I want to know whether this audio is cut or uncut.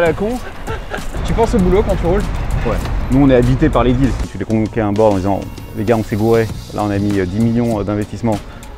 cut